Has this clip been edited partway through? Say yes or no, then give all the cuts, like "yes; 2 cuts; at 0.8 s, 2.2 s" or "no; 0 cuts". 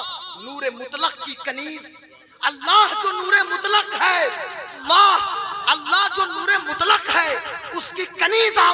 yes; 1 cut; at 4.8 s